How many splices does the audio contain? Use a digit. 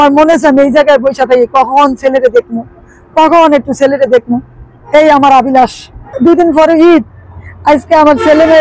1